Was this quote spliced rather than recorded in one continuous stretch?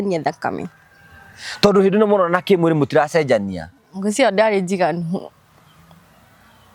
no; 0 cuts

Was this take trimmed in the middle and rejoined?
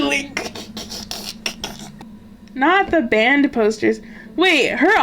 yes; 1 cut; at 2.0 s

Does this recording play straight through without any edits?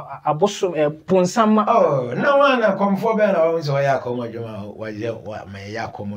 yes; 0 cuts

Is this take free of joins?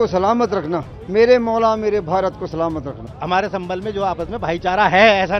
no; 2 cuts; at 0.9 s, 3.1 s

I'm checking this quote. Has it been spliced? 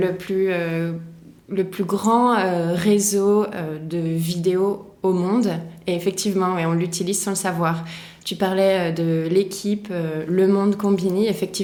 no; 0 cuts

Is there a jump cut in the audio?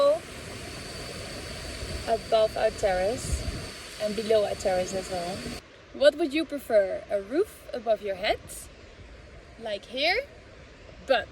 yes; 1 cut; at 5.6 s

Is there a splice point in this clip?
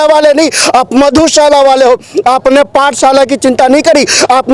no; 0 cuts

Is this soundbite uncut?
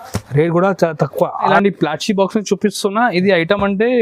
no; 1 cut; at 1.6 s

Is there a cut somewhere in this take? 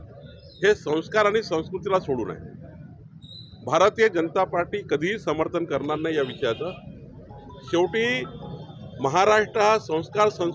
no; 0 cuts

